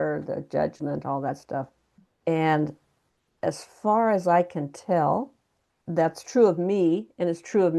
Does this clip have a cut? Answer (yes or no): yes